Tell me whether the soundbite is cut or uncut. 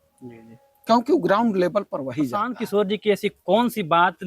cut